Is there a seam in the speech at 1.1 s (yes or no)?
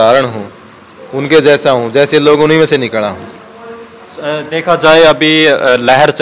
no